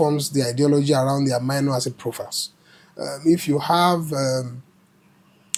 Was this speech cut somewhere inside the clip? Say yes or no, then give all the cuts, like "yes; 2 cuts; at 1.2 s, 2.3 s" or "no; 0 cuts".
no; 0 cuts